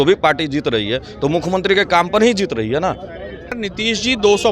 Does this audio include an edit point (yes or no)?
yes